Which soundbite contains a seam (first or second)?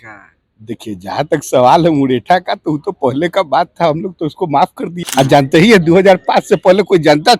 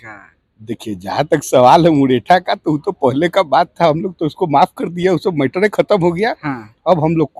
first